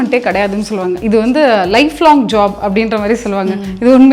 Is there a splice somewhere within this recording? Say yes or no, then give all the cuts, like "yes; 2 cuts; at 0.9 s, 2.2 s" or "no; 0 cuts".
yes; 1 cut; at 1.0 s